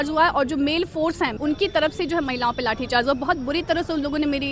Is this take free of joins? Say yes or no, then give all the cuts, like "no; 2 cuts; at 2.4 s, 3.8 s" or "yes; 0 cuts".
no; 1 cut; at 1.4 s